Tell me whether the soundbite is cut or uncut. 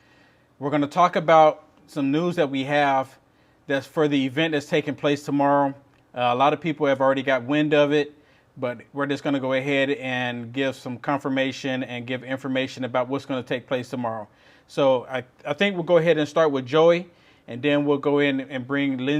uncut